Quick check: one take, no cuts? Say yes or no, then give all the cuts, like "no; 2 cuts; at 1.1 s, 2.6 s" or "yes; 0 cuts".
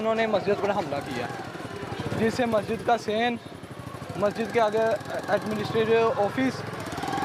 yes; 0 cuts